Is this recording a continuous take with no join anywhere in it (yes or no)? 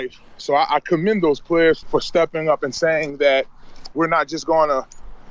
no